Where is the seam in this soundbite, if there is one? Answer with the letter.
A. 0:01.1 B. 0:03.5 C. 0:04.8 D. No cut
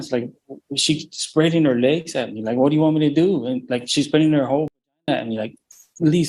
D